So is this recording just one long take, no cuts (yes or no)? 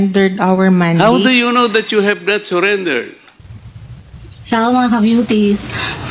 yes